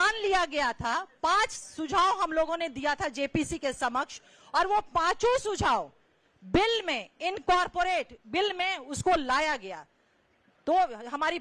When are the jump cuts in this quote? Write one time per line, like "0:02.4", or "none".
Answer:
none